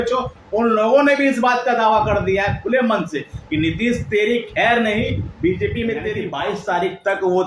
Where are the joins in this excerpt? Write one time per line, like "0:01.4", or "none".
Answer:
0:06.3